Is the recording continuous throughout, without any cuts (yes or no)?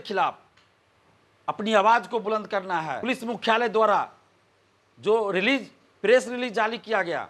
no